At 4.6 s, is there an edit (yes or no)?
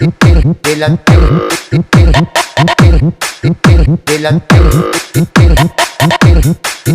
yes